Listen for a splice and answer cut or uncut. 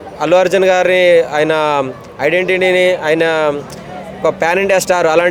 uncut